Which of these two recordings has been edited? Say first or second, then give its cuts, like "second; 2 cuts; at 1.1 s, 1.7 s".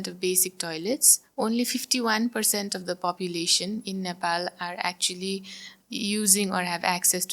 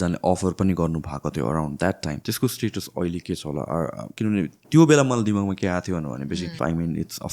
second; 3 cuts; at 2.2 s, 4.1 s, 6.6 s